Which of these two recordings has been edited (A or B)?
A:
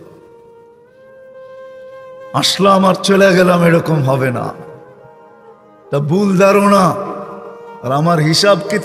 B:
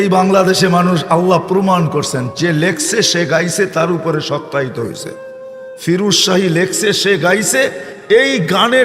B